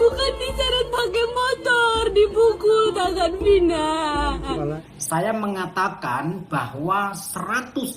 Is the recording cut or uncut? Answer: cut